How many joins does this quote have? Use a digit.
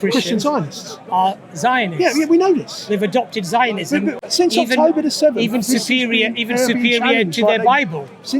1